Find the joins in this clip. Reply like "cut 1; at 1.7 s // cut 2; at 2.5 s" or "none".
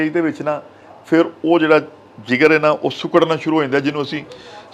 none

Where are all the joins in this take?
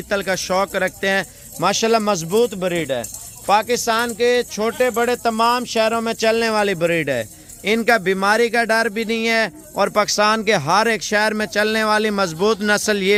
none

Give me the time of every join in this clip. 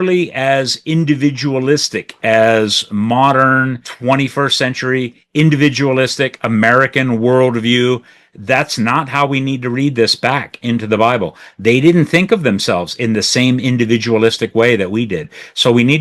cut 1; at 3.9 s

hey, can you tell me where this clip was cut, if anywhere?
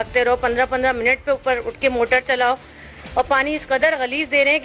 none

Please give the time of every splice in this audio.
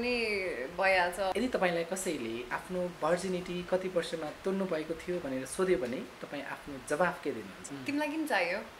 cut 1; at 1.3 s // cut 2; at 7.7 s

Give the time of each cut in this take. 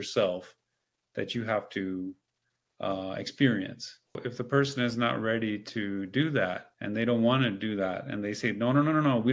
cut 1; at 4.2 s // cut 2; at 6.7 s

